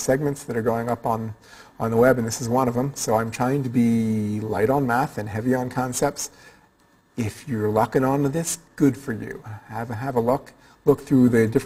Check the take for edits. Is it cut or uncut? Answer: cut